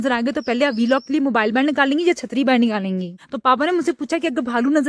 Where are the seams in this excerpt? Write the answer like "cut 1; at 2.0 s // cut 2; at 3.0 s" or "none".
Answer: none